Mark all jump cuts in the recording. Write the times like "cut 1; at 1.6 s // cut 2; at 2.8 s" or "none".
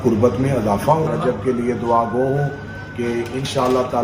cut 1; at 1.1 s